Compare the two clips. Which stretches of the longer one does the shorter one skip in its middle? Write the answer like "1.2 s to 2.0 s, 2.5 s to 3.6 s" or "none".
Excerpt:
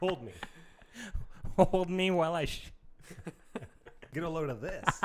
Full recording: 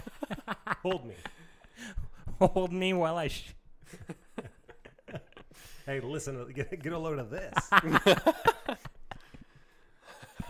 4.9 s to 6.8 s